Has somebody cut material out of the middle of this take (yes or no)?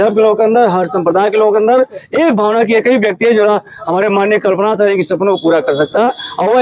no